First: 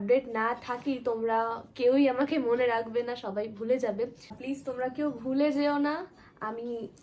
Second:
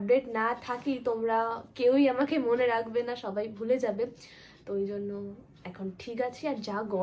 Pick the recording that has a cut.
first; 1 cut; at 4.4 s

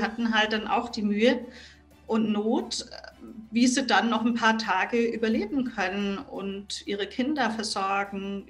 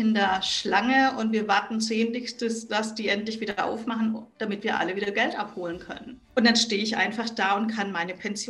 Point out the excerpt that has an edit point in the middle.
second; 1 cut; at 6.1 s

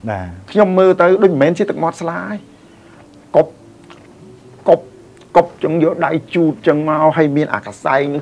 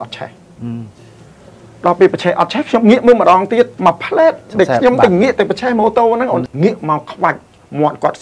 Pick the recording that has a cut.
second; 2 cuts; at 3.7 s, 6.4 s

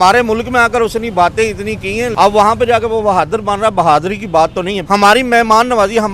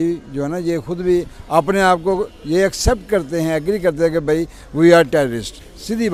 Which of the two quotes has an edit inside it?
first; 2 cuts; at 2.1 s, 4.8 s

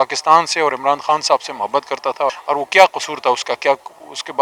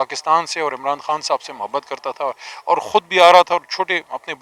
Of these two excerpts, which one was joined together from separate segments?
first; 1 cut; at 2.4 s

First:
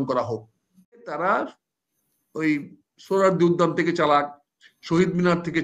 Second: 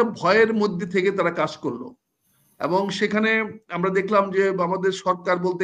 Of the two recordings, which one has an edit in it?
first; 1 cut; at 1.1 s

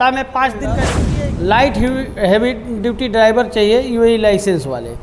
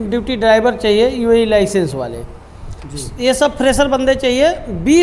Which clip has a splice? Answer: first; 1 cut; at 1.0 s

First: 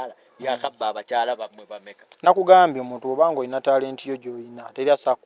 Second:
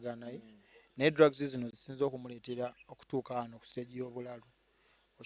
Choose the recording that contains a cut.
second; 1 cut; at 1.8 s

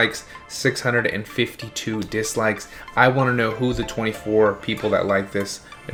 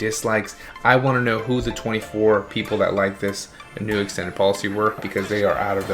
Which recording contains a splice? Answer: second; 1 cut; at 5.0 s

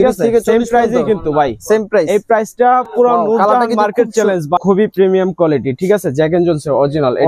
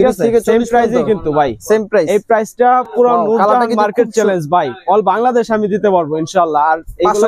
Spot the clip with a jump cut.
first; 1 cut; at 4.6 s

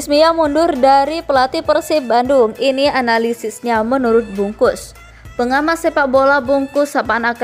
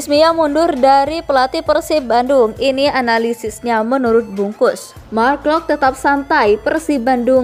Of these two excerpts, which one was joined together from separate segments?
second; 1 cut; at 4.9 s

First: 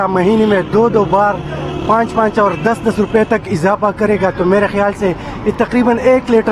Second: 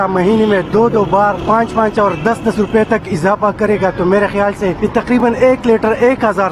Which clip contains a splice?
second; 2 cuts; at 1.4 s, 5.2 s

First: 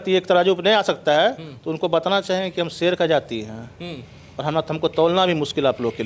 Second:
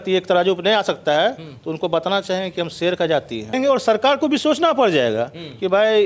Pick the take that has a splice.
second; 1 cut; at 3.5 s

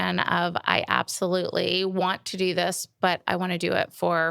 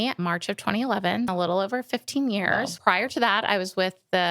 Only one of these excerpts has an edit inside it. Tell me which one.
second; 2 cuts; at 1.3 s, 2.7 s

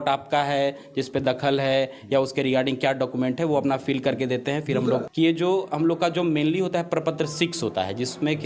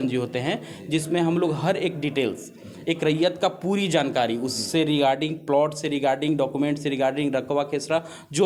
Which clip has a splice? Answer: first; 1 cut; at 5.1 s

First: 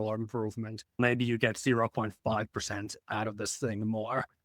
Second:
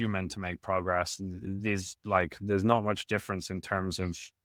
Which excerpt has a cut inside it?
first; 1 cut; at 1.0 s

